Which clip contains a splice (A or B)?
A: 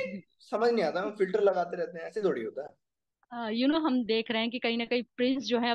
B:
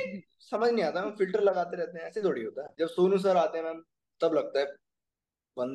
B